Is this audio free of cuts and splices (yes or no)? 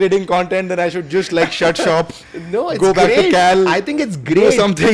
yes